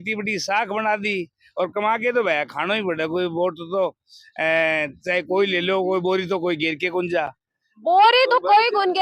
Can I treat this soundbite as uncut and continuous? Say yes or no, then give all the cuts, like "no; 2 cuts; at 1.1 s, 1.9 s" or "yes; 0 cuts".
yes; 0 cuts